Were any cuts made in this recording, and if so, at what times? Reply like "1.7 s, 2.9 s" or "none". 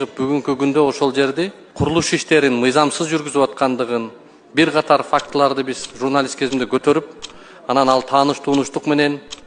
1.6 s